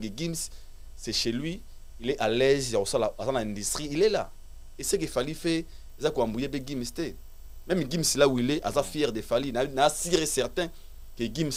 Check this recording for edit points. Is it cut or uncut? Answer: uncut